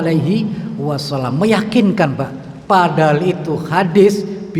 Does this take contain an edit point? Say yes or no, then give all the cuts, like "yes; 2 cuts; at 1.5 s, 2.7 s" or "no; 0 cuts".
no; 0 cuts